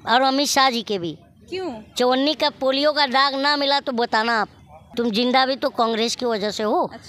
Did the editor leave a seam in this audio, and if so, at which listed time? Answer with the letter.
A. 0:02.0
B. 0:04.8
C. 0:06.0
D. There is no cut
B